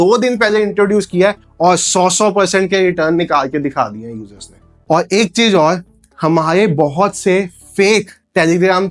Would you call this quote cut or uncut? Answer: uncut